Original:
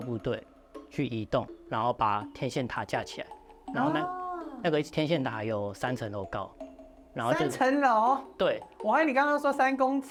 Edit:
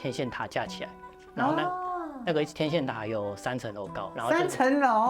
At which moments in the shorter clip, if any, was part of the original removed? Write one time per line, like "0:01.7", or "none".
0:04.0